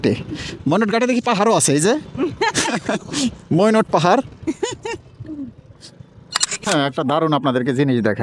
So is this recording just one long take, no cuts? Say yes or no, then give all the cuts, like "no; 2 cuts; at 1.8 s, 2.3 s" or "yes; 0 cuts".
no; 1 cut; at 6.6 s